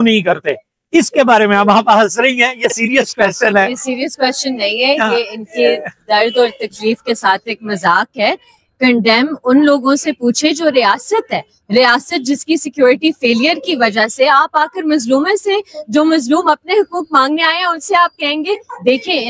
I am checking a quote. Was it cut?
no; 0 cuts

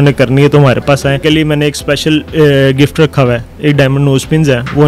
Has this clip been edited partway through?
yes; 2 cuts; at 1.2 s, 3.5 s

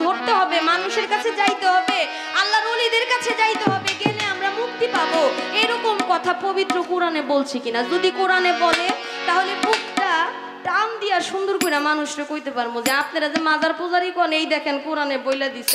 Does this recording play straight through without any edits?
yes; 0 cuts

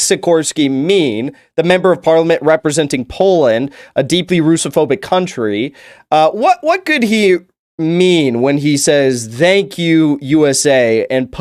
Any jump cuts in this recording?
no; 0 cuts

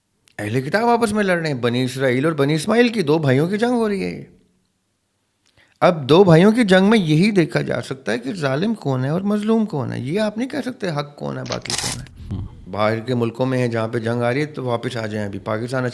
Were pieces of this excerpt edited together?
yes; 1 cut; at 12.3 s

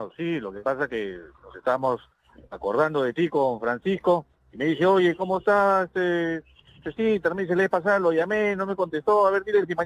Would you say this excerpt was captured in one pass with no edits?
yes; 0 cuts

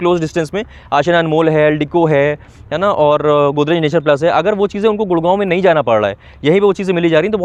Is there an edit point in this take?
no; 0 cuts

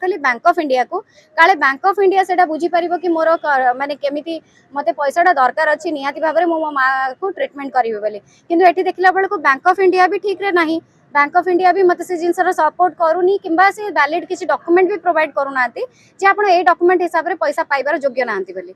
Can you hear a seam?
no; 0 cuts

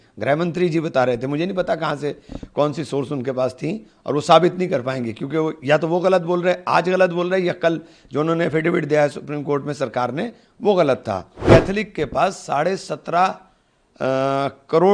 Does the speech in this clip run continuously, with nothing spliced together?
no; 1 cut; at 11.3 s

